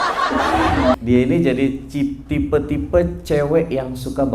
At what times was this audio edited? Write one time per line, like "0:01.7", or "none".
0:01.0